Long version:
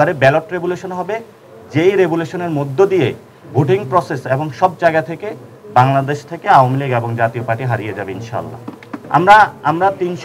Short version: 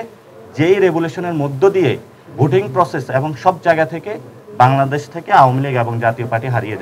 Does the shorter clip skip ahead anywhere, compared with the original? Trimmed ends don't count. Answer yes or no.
no